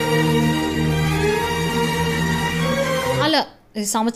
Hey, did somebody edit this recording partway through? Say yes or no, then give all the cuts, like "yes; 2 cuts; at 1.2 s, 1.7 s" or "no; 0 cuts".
yes; 1 cut; at 3.2 s